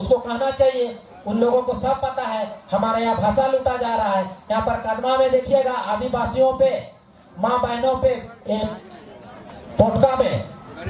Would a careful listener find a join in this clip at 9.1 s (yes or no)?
no